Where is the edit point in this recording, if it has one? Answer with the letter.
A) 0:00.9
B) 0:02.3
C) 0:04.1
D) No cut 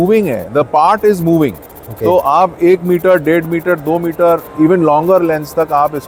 D